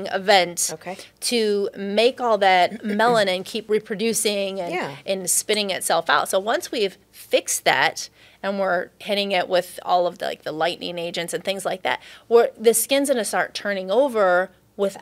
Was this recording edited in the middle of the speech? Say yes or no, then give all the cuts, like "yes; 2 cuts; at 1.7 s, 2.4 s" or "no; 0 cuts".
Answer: no; 0 cuts